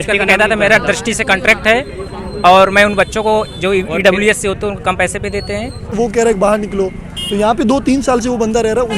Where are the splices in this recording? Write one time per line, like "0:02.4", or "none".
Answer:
0:05.9